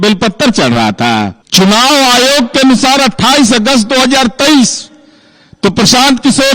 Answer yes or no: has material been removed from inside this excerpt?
yes